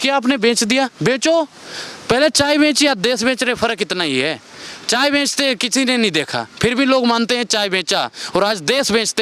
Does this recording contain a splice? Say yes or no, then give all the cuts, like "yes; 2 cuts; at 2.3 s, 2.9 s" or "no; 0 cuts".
no; 0 cuts